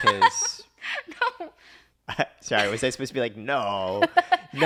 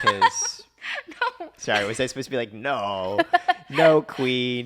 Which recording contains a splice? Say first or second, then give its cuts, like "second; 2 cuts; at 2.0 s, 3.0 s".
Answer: second; 1 cut; at 1.5 s